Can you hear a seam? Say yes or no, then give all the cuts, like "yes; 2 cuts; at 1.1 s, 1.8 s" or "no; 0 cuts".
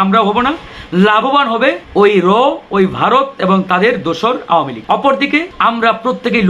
yes; 3 cuts; at 1.8 s, 4.8 s, 5.5 s